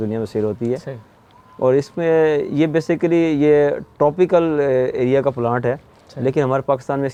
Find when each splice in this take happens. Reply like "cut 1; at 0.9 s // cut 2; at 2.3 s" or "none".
none

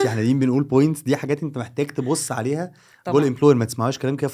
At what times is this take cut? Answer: none

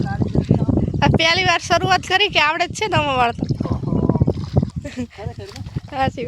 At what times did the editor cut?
cut 1; at 4.7 s

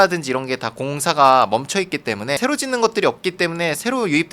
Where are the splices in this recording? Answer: cut 1; at 2.4 s

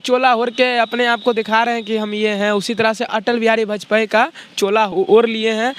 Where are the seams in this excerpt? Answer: cut 1; at 3.1 s // cut 2; at 4.9 s

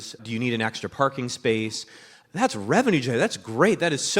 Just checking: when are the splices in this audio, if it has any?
cut 1; at 2.1 s

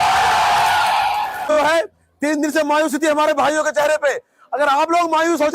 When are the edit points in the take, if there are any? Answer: cut 1; at 1.5 s

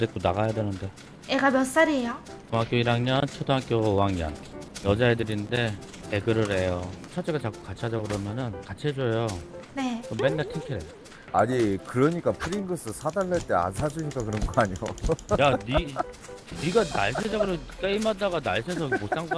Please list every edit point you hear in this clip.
cut 1; at 6.9 s // cut 2; at 11.2 s

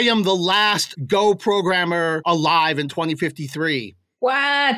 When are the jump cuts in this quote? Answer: cut 1; at 0.9 s // cut 2; at 2.2 s

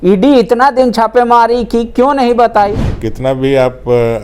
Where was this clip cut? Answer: cut 1; at 2.8 s

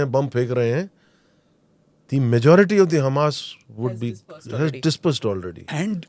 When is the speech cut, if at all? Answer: none

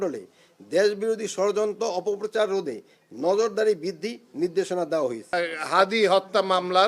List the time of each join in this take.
cut 1; at 5.2 s

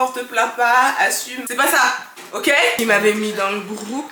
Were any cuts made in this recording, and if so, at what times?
cut 1; at 1.3 s // cut 2; at 2.8 s

